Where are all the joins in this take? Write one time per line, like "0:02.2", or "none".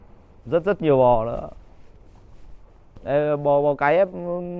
0:02.8

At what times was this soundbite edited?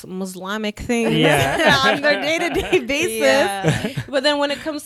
none

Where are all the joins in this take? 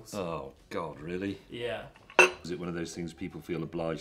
0:02.5

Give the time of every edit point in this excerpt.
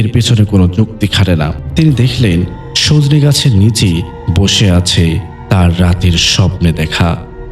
0:01.6

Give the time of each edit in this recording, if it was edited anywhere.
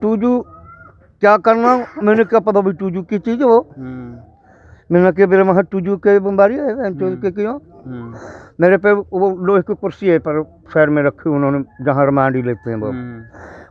none

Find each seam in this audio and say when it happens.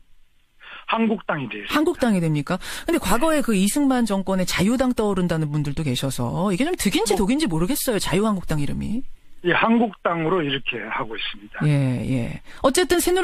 none

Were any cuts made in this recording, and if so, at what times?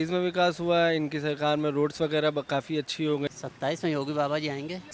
0:03.4

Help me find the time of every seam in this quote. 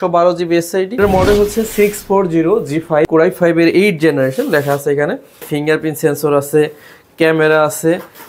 0:01.0
0:03.0
0:05.5

